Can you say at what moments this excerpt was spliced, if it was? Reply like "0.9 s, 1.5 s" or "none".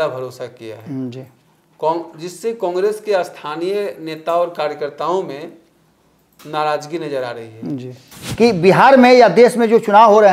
8.2 s

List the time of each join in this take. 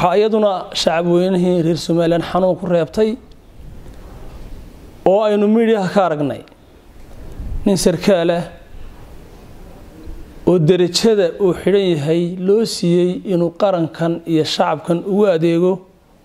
none

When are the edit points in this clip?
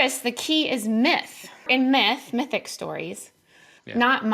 1.7 s

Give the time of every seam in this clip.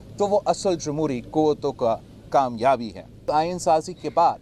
3.2 s

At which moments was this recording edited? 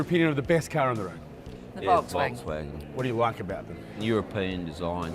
4.0 s

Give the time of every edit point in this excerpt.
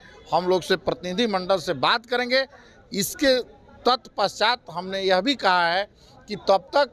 none

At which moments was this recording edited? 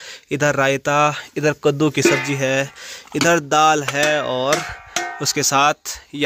none

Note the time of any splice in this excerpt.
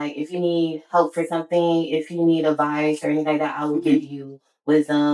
none

